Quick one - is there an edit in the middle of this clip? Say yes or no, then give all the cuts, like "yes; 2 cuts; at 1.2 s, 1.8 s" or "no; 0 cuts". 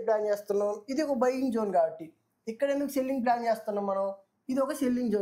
no; 0 cuts